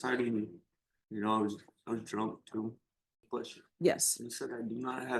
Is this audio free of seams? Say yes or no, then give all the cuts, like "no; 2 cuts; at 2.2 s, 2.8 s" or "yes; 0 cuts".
no; 1 cut; at 3.2 s